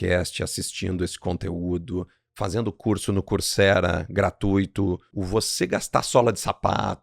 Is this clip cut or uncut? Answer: cut